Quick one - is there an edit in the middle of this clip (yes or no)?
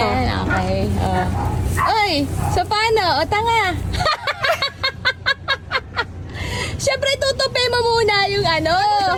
no